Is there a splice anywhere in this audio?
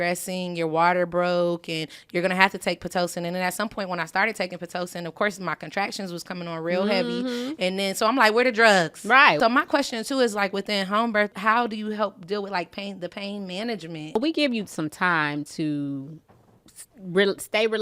yes; 3 cuts; at 9.4 s, 11.4 s, 14.2 s

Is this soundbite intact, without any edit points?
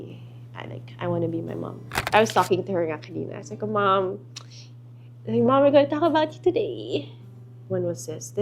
no; 2 cuts; at 2.1 s, 7.5 s

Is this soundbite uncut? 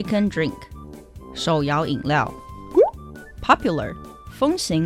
yes; 0 cuts

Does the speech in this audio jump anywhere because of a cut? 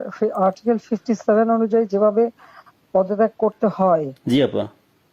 no; 0 cuts

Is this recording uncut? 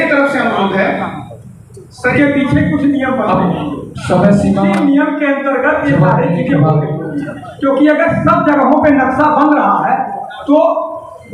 no; 1 cut; at 2.1 s

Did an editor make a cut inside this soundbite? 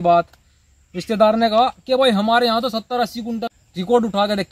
yes; 1 cut; at 3.5 s

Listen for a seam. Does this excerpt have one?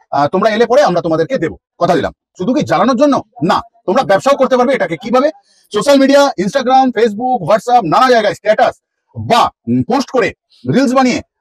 yes; 1 cut; at 2.3 s

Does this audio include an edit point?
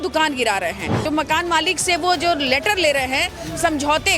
yes; 1 cut; at 1.0 s

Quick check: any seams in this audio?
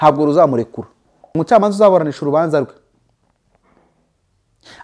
yes; 1 cut; at 1.3 s

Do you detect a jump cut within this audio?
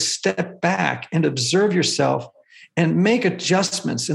no; 0 cuts

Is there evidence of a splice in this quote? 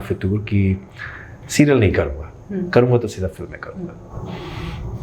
no; 0 cuts

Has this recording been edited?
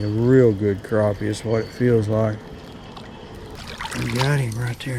yes; 1 cut; at 3.5 s

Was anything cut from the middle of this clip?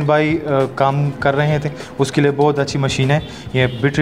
no; 0 cuts

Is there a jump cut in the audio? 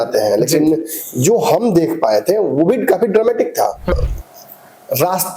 yes; 1 cut; at 3.9 s

